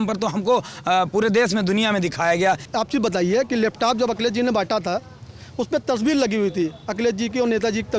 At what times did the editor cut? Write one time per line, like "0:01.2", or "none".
0:02.7